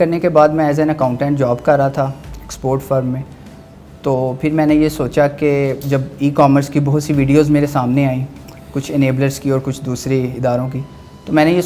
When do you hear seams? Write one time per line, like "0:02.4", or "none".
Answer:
none